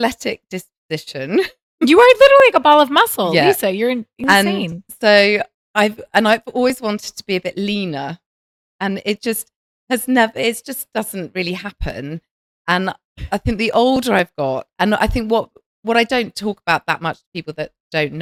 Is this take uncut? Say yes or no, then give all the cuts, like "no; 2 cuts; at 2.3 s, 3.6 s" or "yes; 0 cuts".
yes; 0 cuts